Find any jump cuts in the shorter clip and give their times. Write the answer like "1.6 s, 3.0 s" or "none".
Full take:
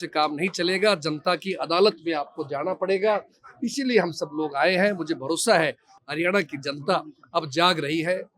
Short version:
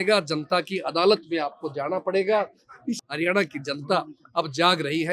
2.9 s